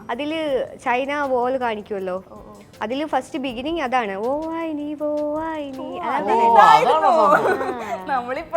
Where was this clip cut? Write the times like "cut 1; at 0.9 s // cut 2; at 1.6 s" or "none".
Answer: none